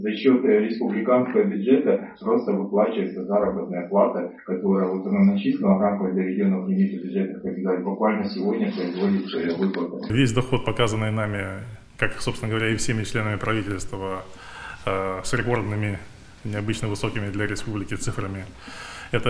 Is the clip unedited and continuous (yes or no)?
no